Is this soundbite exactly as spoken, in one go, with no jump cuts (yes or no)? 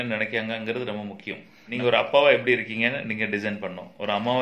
no